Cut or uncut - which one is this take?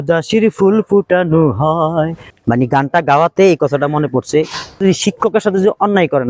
cut